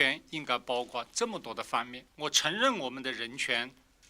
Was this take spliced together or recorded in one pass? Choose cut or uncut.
cut